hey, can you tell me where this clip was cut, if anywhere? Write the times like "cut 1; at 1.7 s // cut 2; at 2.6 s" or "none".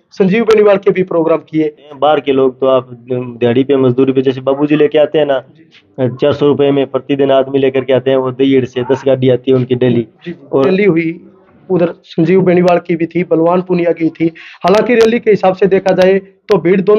cut 1; at 1.9 s // cut 2; at 10.7 s

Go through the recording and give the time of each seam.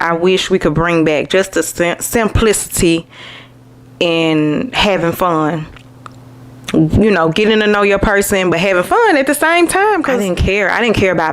cut 1; at 10.2 s

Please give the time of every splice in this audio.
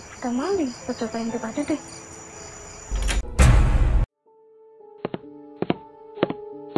cut 1; at 3.3 s // cut 2; at 4.7 s

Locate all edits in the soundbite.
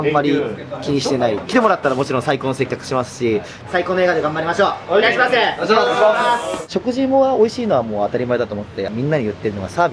cut 1; at 1.4 s // cut 2; at 3.6 s // cut 3; at 6.6 s // cut 4; at 8.9 s

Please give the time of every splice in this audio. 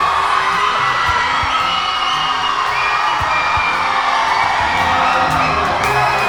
none

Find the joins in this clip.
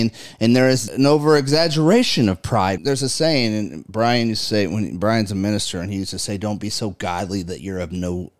cut 1; at 0.8 s // cut 2; at 2.8 s

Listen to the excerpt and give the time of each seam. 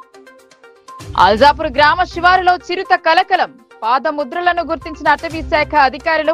cut 1; at 0.9 s

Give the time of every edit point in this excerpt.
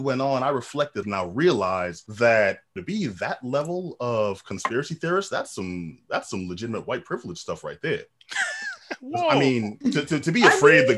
cut 1; at 1.0 s // cut 2; at 2.0 s // cut 3; at 2.7 s

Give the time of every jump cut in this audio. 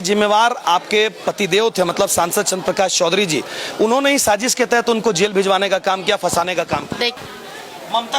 cut 1; at 7.2 s

